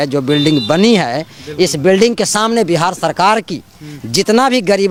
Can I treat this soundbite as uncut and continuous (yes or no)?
yes